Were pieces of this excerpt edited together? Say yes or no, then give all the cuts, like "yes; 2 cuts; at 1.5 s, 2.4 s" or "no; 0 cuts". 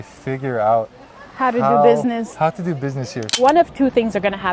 yes; 1 cut; at 3.2 s